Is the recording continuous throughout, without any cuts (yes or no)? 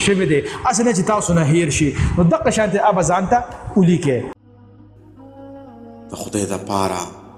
no